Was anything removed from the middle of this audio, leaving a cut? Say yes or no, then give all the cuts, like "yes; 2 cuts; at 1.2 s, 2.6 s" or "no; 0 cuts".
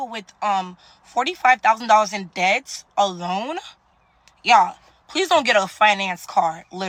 no; 0 cuts